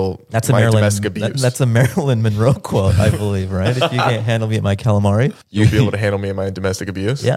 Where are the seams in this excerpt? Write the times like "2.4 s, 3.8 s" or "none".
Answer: none

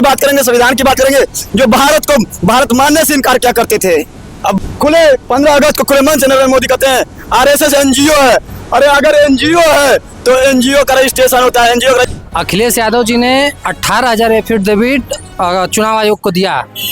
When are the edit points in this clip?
4.6 s, 12.1 s

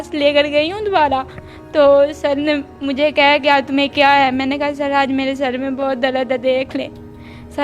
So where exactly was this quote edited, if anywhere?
none

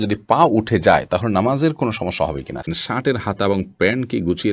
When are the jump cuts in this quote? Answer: 2.7 s

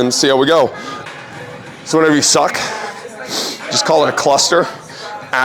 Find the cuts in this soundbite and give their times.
0.9 s

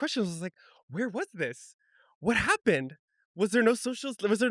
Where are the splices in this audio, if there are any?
none

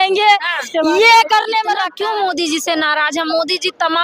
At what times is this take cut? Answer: 1.8 s

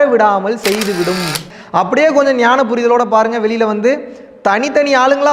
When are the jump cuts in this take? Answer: 1.4 s

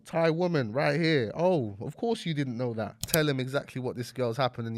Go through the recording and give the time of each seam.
3.1 s

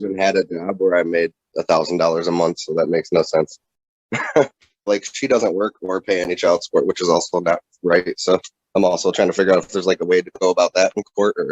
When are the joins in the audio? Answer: 4.9 s, 8.6 s

